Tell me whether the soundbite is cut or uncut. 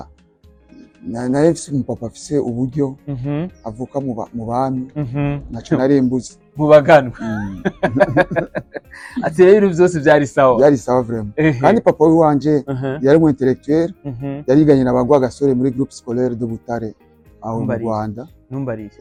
uncut